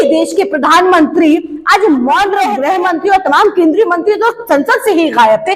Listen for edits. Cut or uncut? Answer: cut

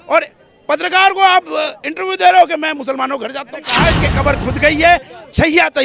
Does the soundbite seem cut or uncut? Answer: cut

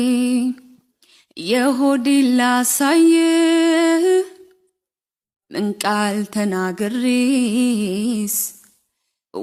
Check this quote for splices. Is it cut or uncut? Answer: uncut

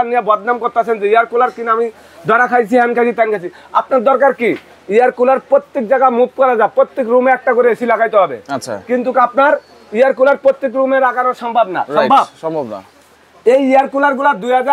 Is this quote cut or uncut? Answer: uncut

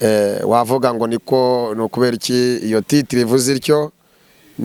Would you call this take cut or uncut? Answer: uncut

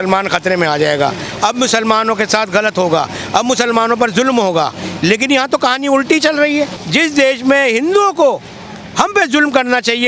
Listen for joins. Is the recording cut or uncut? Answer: cut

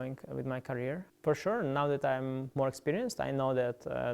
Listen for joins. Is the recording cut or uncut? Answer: cut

